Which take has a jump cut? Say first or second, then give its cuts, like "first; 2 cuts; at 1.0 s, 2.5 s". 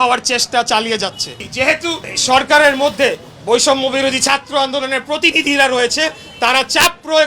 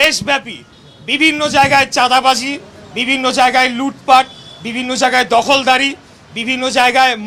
first; 1 cut; at 1.4 s